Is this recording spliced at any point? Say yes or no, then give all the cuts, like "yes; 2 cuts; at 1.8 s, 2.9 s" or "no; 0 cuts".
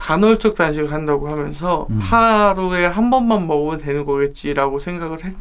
yes; 1 cut; at 2.0 s